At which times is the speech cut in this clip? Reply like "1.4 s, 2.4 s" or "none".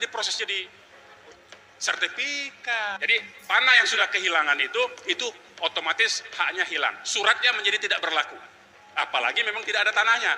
3.0 s